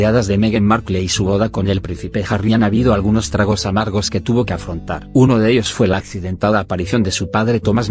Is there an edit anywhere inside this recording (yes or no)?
yes